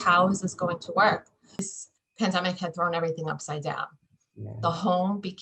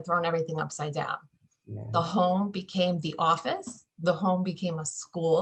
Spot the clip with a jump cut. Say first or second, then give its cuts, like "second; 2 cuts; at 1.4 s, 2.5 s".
first; 1 cut; at 1.8 s